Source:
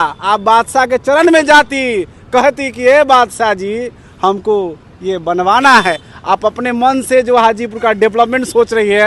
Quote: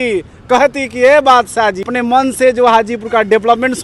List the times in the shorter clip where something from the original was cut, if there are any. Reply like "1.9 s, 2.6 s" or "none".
1.9 s